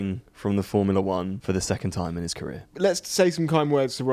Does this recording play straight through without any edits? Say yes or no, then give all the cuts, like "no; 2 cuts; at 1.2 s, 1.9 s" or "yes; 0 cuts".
no; 2 cuts; at 1.4 s, 2.6 s